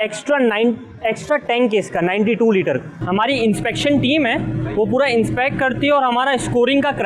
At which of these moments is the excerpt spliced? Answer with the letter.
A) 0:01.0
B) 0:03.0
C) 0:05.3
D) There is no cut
B